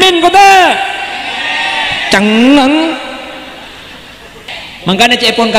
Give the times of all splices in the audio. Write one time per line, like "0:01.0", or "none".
0:04.5